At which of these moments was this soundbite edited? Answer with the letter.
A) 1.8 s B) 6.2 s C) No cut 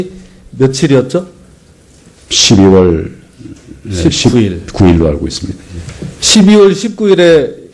B